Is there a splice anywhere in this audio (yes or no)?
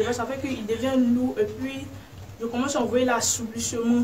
no